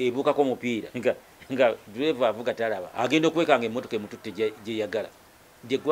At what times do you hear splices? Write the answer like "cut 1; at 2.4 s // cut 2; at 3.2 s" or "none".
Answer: cut 1; at 0.9 s // cut 2; at 2.9 s